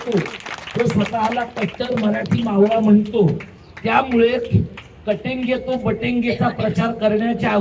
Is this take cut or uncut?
uncut